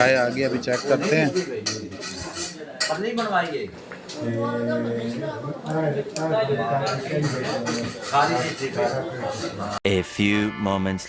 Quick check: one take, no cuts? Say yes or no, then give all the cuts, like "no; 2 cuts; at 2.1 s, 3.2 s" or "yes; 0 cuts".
no; 2 cuts; at 6.8 s, 9.8 s